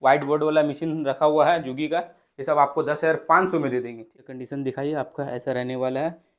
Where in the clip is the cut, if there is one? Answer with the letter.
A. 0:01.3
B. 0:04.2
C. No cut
B